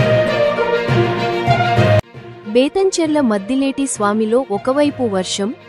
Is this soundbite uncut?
no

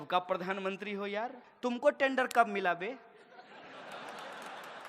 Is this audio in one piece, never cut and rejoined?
no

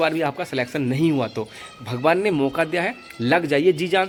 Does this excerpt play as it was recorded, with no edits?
yes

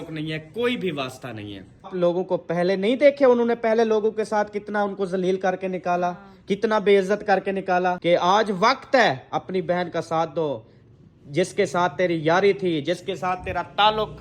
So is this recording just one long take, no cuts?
no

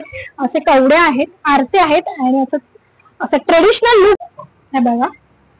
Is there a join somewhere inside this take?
yes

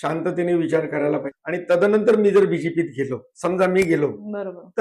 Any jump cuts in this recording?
yes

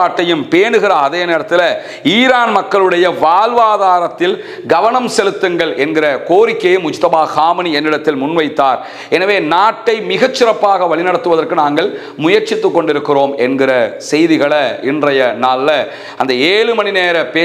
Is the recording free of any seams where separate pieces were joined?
yes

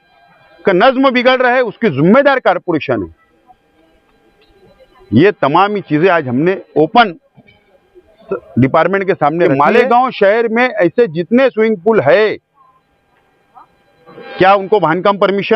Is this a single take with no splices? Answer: no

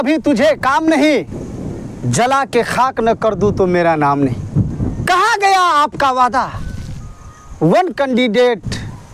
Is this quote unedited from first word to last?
no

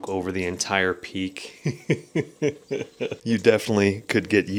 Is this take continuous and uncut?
yes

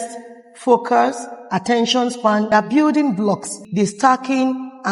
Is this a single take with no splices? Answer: no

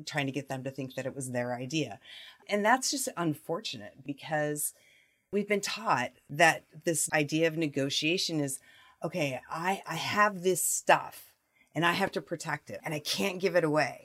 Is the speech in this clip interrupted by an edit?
yes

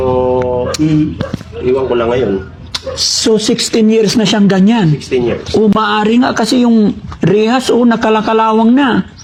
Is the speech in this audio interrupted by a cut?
no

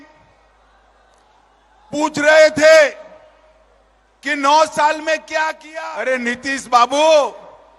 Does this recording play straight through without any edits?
no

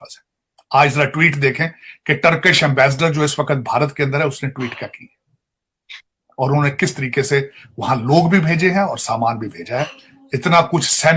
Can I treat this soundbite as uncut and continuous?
yes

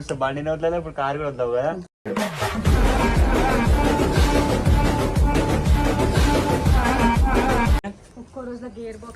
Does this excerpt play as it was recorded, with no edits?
no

